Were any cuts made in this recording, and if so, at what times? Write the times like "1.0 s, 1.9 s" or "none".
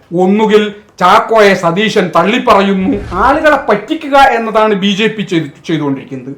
3.0 s